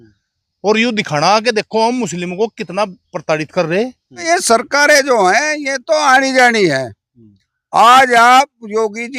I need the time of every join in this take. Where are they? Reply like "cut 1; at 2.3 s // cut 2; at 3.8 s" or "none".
cut 1; at 4.3 s